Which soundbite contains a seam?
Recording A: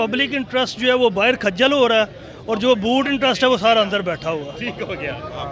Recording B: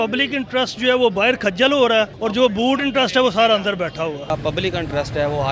B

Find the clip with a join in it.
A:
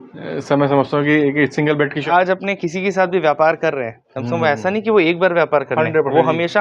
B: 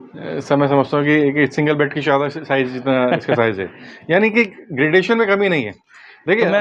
A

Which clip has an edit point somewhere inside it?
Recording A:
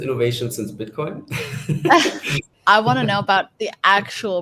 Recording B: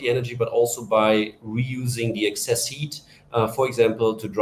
A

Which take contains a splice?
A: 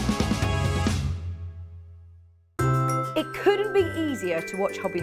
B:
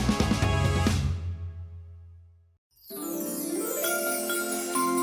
A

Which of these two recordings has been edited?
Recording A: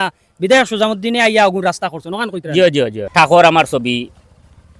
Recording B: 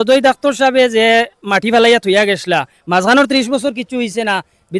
A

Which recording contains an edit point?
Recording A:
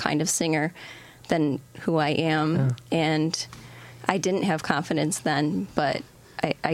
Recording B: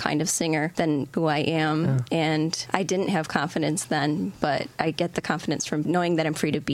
B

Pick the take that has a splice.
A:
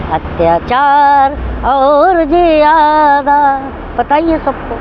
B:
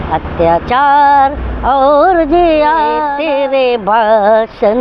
B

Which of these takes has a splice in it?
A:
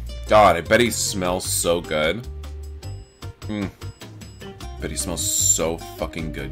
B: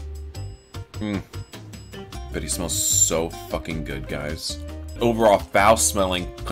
B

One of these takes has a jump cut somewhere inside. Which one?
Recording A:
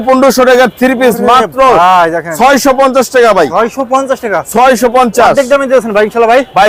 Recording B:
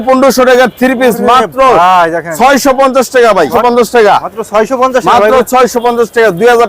B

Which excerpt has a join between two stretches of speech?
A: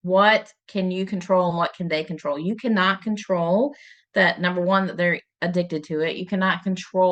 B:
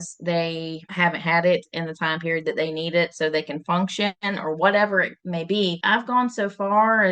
B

